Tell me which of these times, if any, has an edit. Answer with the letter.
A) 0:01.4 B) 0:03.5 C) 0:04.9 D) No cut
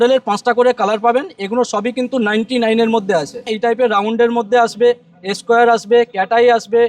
B